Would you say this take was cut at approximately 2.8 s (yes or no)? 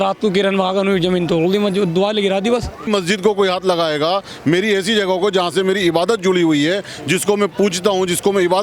yes